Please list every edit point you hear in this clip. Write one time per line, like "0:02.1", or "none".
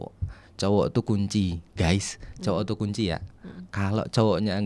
none